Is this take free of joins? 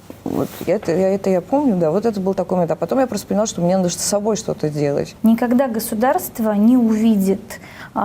no; 1 cut; at 5.1 s

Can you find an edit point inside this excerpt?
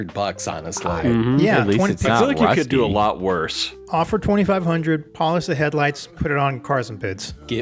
no; 0 cuts

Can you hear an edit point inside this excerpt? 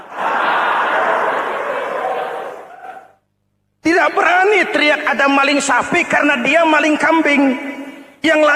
no; 0 cuts

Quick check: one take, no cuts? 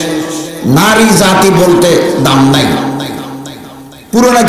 yes; 0 cuts

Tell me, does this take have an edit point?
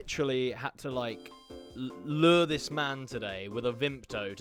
no; 0 cuts

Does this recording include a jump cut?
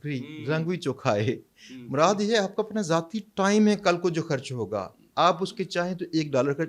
no; 0 cuts

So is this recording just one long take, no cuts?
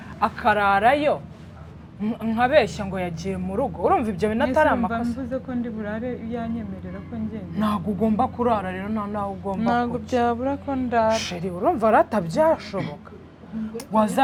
yes; 0 cuts

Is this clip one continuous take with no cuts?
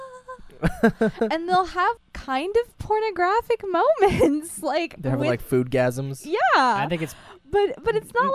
no; 1 cut; at 2.0 s

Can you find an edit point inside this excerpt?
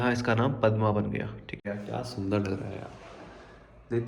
yes; 1 cut; at 1.6 s

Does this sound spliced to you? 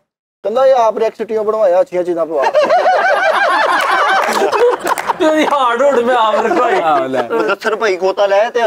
no; 0 cuts

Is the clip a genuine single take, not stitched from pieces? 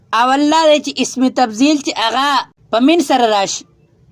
no; 1 cut; at 2.5 s

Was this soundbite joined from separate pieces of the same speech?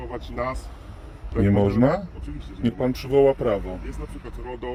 no; 0 cuts

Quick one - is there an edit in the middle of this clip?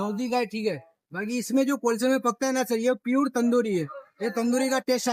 no; 0 cuts

